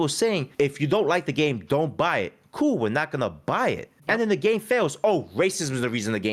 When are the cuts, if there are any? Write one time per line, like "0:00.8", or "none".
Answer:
none